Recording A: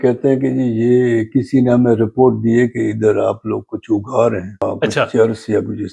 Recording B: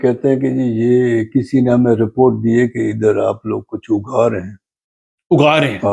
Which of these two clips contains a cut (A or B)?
A